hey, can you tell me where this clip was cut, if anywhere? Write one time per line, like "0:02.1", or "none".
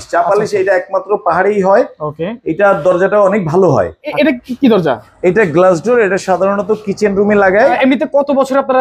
0:04.0
0:07.7